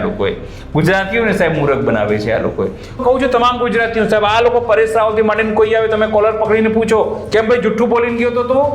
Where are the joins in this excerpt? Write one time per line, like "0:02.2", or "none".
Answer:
0:03.0